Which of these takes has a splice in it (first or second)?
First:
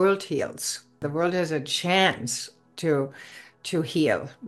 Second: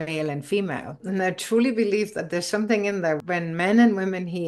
first